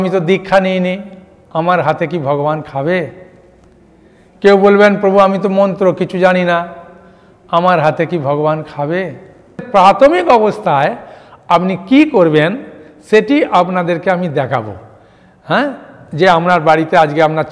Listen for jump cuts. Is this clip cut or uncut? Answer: cut